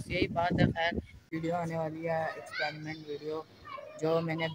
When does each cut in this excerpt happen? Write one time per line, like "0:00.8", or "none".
0:01.2